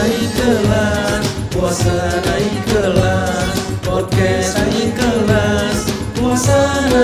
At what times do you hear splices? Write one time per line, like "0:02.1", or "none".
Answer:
none